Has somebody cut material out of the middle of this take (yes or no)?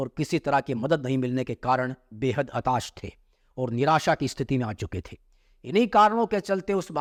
no